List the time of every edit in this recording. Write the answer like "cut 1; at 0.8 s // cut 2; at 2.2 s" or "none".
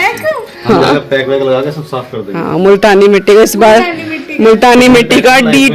none